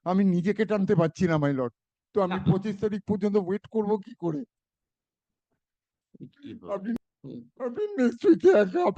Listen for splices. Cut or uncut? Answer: cut